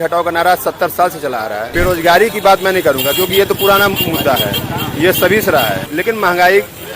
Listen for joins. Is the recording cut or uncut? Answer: cut